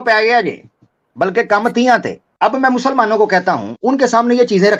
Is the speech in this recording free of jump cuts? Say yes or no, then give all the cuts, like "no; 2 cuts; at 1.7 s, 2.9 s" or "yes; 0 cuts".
no; 2 cuts; at 2.2 s, 3.7 s